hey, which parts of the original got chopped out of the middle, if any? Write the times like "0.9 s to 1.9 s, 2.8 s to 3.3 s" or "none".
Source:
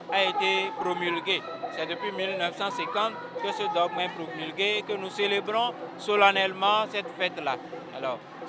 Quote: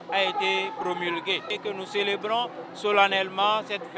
1.5 s to 4.8 s